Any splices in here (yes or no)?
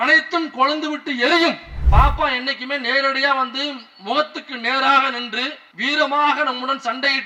yes